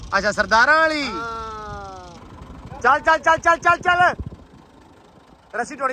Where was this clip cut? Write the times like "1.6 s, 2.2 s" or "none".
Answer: 2.2 s